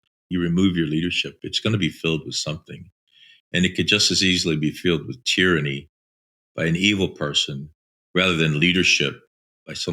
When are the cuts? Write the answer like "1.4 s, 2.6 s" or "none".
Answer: none